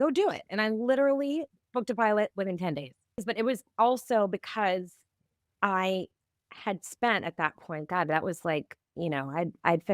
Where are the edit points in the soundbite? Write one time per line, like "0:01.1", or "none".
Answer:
0:03.2